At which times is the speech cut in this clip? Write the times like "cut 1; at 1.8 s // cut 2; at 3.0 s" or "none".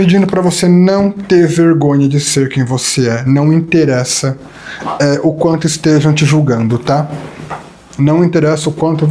none